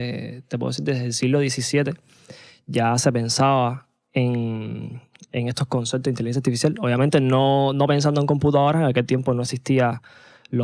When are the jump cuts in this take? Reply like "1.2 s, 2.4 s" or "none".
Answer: none